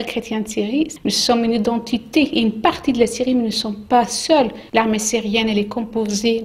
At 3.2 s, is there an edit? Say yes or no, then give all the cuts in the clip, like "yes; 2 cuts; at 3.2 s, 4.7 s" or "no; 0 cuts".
no; 2 cuts; at 0.9 s, 4.6 s